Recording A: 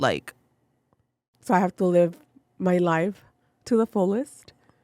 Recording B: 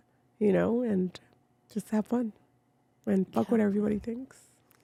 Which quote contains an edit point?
A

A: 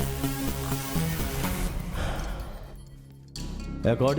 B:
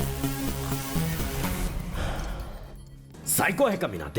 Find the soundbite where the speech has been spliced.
B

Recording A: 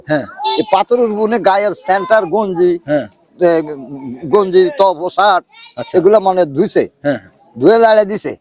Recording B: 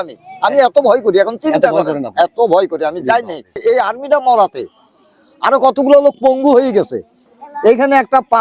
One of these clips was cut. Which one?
B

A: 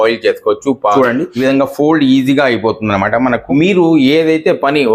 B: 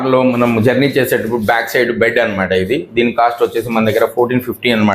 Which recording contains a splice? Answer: A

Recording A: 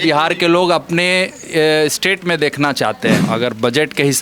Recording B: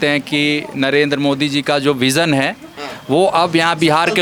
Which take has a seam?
A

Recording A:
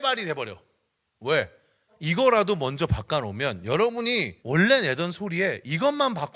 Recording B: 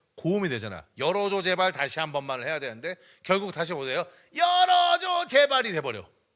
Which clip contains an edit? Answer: A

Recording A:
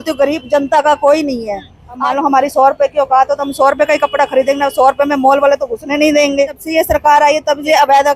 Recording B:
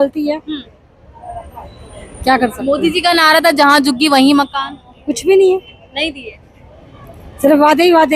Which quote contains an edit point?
A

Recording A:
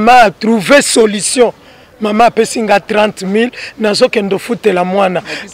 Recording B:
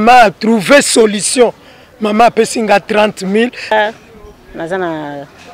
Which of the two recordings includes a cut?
B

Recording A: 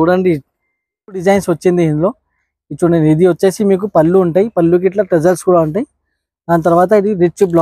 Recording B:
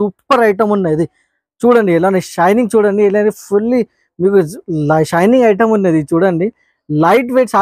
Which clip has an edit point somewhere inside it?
A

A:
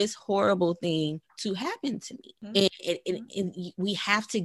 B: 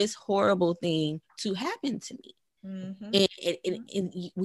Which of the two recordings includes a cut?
A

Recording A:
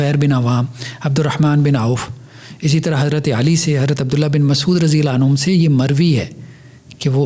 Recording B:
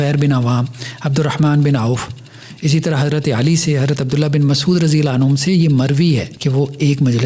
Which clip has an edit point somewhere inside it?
B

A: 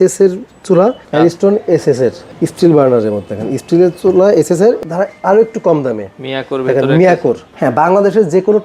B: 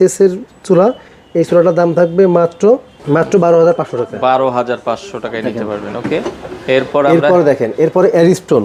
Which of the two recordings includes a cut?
A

